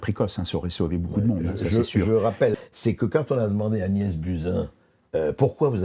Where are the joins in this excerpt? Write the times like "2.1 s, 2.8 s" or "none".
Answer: 2.5 s